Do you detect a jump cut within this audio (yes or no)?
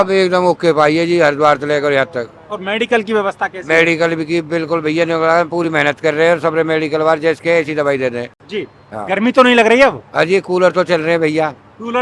no